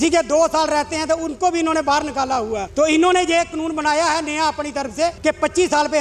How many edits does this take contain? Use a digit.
2